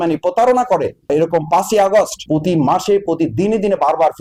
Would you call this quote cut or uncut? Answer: uncut